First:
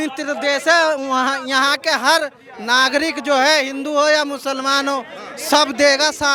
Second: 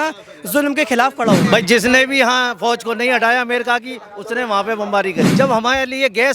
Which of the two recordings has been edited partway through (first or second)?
second